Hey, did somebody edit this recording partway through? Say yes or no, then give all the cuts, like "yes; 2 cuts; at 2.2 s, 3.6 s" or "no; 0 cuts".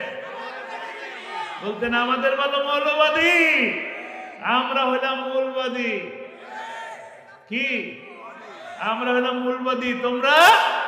no; 0 cuts